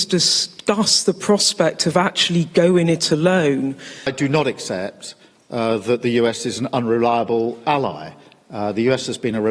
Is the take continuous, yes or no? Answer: no